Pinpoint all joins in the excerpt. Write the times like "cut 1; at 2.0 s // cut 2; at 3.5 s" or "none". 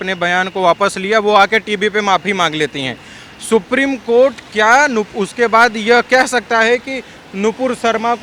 none